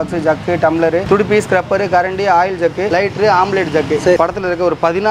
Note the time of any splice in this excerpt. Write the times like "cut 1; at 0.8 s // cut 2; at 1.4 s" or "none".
cut 1; at 1.0 s // cut 2; at 2.9 s // cut 3; at 4.2 s